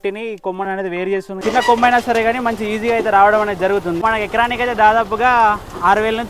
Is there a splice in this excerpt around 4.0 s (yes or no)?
yes